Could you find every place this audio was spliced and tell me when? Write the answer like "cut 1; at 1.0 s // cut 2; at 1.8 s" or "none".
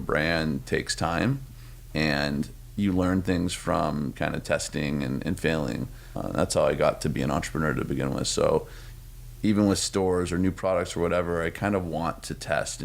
cut 1; at 1.5 s // cut 2; at 6.1 s